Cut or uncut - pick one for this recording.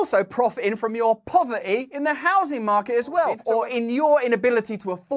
cut